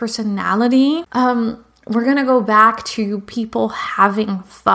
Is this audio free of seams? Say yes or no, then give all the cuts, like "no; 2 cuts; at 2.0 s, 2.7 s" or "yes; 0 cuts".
no; 1 cut; at 1.1 s